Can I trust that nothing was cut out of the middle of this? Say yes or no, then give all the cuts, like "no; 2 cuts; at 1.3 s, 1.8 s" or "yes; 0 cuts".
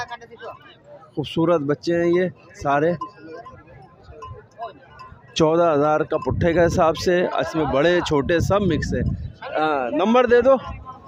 yes; 0 cuts